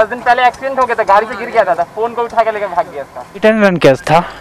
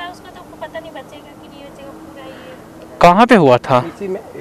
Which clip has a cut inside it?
first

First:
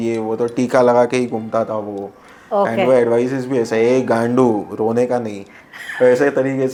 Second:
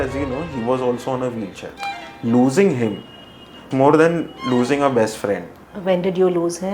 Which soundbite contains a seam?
second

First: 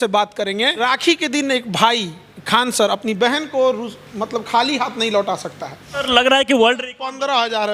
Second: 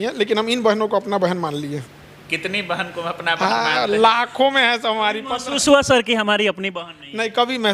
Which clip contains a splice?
first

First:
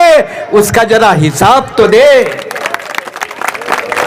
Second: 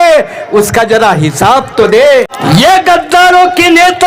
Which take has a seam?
second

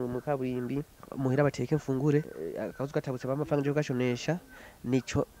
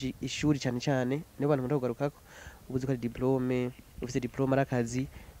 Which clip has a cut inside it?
first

